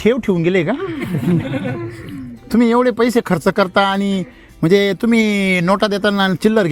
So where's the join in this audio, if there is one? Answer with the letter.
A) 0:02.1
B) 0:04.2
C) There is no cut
C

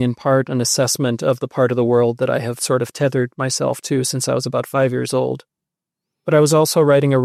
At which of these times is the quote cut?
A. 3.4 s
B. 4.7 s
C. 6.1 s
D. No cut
D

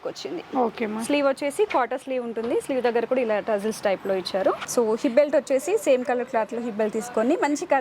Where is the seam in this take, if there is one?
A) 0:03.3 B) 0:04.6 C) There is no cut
B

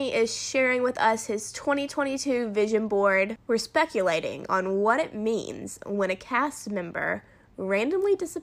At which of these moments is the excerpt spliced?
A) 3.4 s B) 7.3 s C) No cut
A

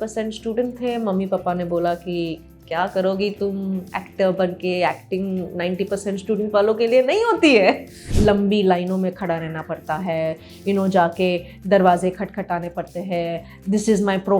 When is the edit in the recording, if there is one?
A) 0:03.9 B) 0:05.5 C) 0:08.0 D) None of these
C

